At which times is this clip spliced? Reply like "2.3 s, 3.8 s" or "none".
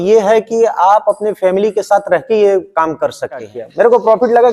3.6 s